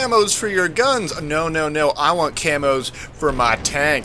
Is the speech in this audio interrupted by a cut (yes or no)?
yes